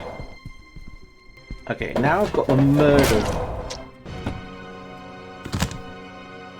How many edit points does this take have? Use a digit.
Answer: 1